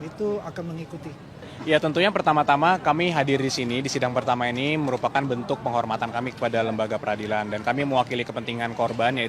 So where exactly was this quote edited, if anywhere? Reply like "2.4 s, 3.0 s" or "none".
1.5 s